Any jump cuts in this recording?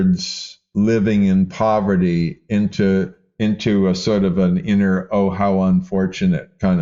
no; 0 cuts

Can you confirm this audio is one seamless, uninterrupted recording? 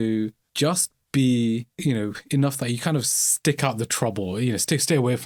yes; 0 cuts

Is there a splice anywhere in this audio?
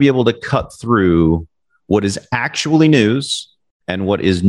no; 0 cuts

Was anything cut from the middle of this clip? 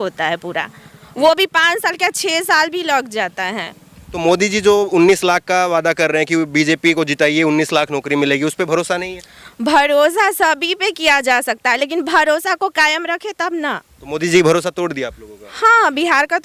no; 0 cuts

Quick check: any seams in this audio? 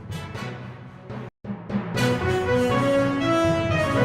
yes; 1 cut; at 1.2 s

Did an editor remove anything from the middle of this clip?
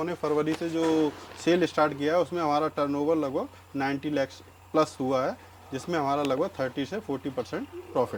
no; 0 cuts

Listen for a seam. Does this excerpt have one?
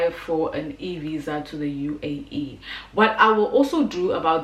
no; 0 cuts

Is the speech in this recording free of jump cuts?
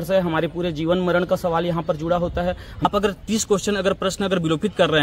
no; 1 cut; at 2.8 s

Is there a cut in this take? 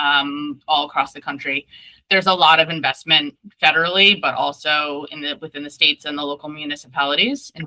no; 0 cuts

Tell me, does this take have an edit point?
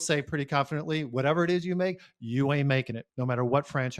yes; 1 cut; at 3.0 s

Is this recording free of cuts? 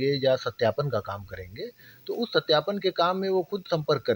yes; 0 cuts

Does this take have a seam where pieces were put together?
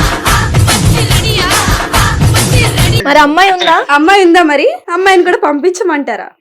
yes; 1 cut; at 3.0 s

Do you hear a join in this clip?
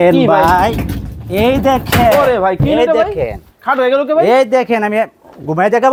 no; 0 cuts

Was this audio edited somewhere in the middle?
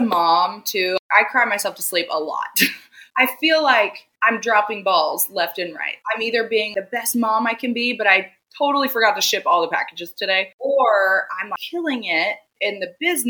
yes; 1 cut; at 1.0 s

